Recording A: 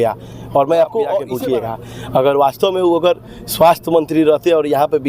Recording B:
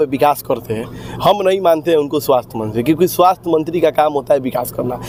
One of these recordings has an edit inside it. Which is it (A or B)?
A